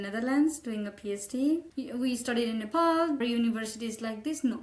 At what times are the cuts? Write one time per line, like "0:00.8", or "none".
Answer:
0:01.7
0:03.2